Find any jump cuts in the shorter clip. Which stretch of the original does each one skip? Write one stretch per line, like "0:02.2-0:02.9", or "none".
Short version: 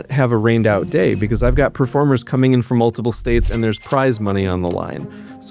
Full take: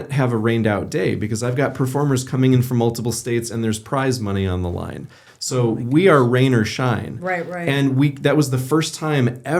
none